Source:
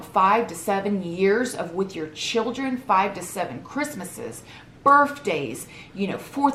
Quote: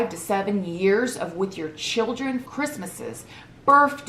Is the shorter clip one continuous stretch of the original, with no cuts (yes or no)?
no